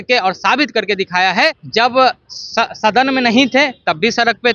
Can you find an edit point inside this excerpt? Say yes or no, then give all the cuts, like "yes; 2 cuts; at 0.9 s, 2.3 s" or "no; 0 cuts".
yes; 1 cut; at 1.6 s